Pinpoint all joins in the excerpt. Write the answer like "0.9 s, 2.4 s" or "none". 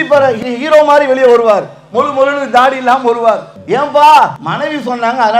3.5 s, 4.4 s